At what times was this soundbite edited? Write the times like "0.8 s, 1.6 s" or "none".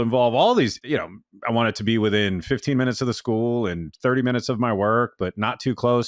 0.8 s, 3.9 s